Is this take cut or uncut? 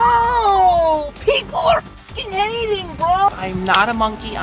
cut